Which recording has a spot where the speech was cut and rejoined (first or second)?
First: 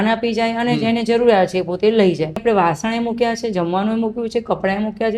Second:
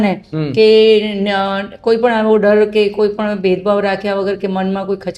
first